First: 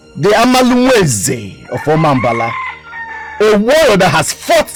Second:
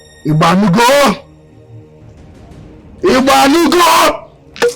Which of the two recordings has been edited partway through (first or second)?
second